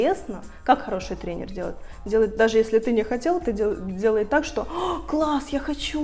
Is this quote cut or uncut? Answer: uncut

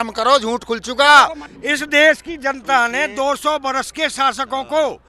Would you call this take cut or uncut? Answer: cut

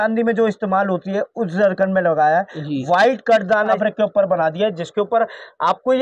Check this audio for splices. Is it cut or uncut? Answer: cut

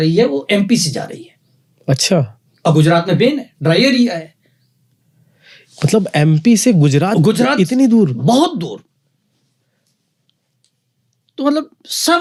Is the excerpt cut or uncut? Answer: uncut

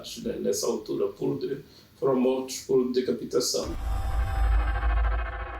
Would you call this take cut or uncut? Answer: cut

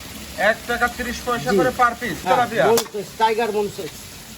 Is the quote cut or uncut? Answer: cut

